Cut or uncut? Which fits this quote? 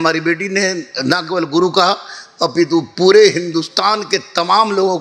uncut